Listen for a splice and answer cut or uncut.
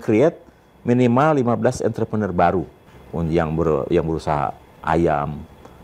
uncut